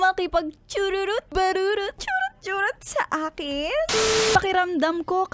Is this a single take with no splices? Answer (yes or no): no